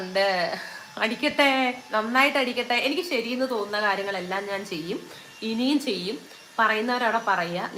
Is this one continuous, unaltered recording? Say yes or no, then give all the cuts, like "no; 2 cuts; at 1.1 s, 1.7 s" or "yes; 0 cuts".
yes; 0 cuts